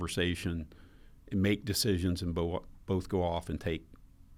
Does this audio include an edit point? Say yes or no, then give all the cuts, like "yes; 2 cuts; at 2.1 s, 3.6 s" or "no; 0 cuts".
no; 0 cuts